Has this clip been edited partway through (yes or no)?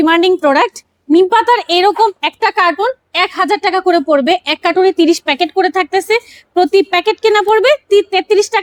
no